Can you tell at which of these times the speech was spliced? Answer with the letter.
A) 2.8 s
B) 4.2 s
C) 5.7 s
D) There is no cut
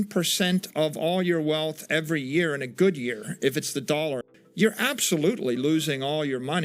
B